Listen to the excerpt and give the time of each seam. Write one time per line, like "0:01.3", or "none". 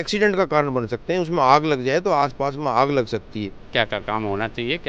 0:03.6